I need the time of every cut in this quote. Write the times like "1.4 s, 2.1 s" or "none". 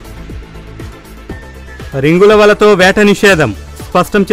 1.1 s, 1.9 s